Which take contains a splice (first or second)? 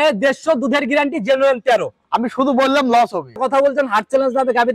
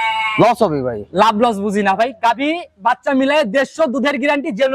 first